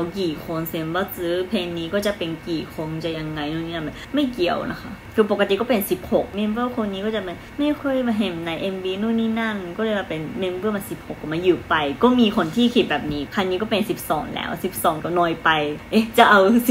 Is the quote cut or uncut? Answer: cut